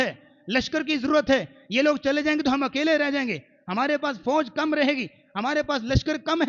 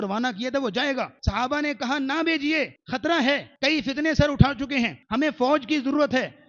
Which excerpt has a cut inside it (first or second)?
second